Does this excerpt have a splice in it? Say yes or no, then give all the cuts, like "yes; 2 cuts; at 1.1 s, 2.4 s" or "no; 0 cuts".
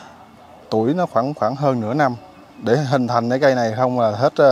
no; 0 cuts